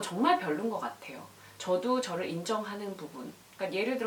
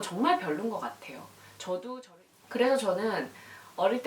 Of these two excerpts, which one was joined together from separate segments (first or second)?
second